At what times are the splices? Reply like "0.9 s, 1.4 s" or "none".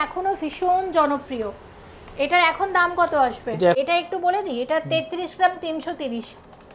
3.8 s

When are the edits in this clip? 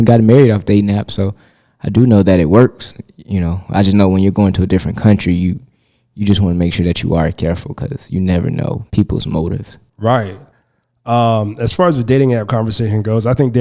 8.8 s

